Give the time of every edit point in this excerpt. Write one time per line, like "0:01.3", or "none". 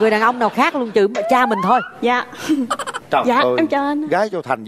0:02.9